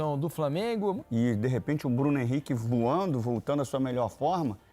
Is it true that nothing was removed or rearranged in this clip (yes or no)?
no